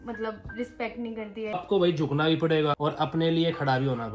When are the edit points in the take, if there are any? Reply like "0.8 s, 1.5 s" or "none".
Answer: 1.5 s, 2.8 s